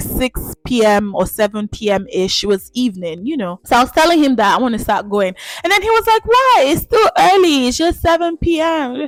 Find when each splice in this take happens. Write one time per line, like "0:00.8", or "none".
none